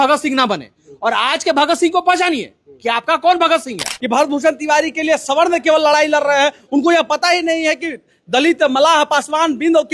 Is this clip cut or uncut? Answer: cut